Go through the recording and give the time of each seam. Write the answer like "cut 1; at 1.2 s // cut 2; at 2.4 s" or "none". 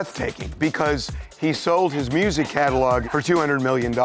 cut 1; at 3.1 s